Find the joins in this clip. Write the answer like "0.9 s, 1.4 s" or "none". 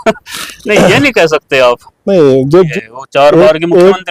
2.7 s